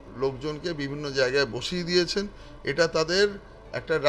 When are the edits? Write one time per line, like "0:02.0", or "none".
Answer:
none

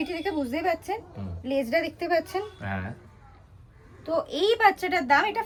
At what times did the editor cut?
none

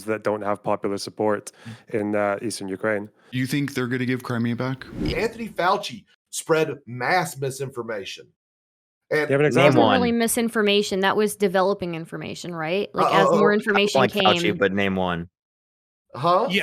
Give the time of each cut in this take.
0:05.1

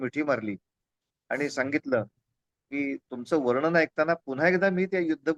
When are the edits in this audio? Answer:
none

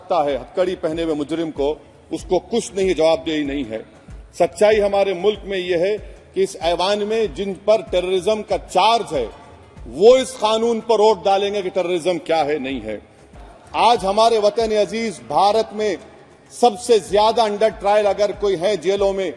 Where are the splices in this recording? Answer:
0:13.4

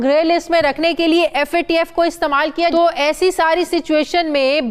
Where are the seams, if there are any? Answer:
0:02.7

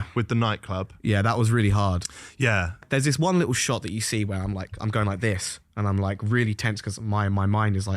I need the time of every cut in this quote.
0:02.8

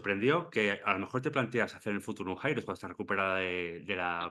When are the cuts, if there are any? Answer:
none

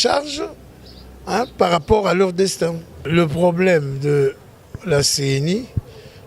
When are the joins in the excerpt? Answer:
0:02.9

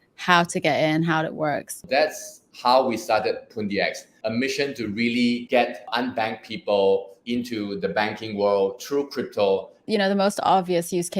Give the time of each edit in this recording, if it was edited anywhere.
0:01.9
0:04.1
0:05.8
0:07.1
0:09.8

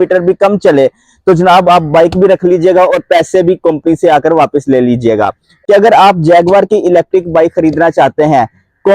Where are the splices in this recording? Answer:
0:05.5

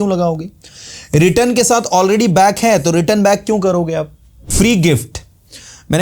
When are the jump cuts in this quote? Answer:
0:04.4

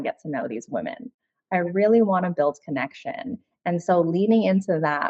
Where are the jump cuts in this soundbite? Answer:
none

